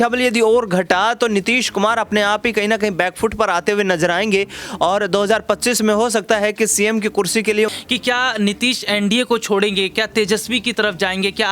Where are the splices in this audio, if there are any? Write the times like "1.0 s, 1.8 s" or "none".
7.7 s